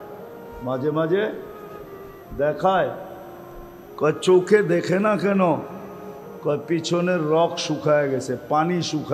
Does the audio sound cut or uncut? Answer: uncut